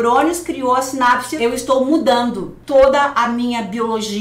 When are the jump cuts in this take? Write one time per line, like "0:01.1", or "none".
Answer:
0:01.3
0:02.5